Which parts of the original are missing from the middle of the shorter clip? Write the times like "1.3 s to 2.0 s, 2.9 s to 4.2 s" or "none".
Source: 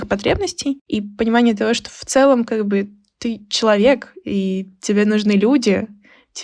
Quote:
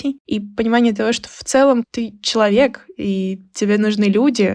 2.5 s to 3.1 s